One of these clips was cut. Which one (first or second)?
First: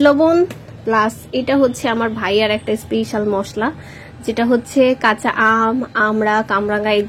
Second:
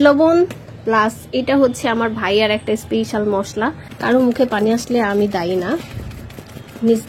second